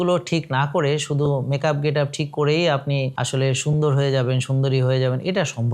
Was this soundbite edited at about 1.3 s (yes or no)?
no